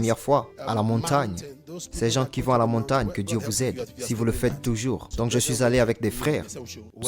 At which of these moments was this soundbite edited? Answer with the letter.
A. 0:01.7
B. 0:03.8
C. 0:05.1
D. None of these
C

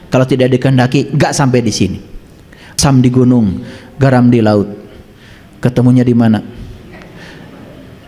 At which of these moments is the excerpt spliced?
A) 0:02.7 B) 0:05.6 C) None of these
A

